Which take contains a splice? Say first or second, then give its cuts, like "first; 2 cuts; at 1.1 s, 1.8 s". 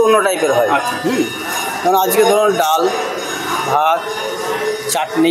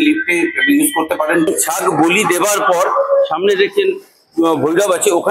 second; 1 cut; at 1.5 s